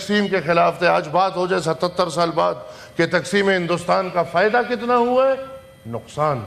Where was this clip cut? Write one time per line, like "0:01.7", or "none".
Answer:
none